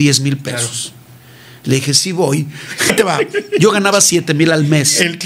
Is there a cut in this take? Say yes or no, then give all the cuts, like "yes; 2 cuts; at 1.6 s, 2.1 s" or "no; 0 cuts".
yes; 1 cut; at 2.9 s